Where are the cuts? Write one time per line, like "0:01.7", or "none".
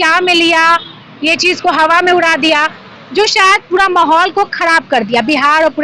none